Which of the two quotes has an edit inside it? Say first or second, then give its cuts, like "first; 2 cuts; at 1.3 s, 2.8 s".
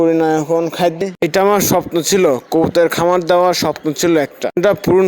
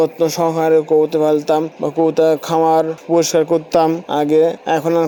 first; 1 cut; at 1.0 s